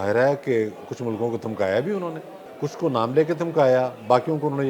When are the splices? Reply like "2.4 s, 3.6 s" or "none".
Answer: 2.4 s